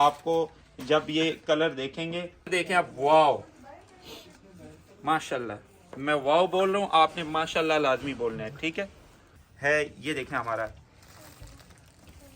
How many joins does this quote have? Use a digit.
2